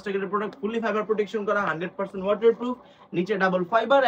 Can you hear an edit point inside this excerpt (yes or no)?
no